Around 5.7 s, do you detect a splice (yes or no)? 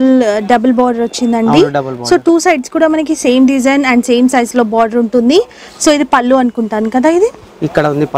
no